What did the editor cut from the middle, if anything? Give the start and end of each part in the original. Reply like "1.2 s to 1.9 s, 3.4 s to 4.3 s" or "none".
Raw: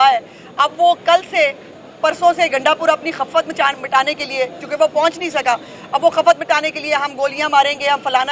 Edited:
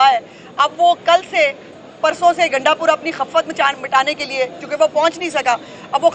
none